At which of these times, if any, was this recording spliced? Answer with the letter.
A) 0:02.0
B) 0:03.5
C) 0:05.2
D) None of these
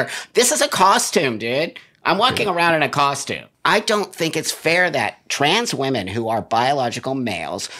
B